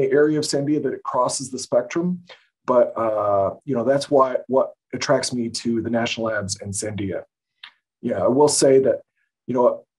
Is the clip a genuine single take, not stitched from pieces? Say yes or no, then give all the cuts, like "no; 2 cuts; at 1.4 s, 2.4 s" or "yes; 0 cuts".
yes; 0 cuts